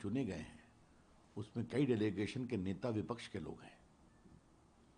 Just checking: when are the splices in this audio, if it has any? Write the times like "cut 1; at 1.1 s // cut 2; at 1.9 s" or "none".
none